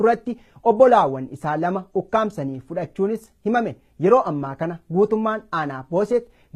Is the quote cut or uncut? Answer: cut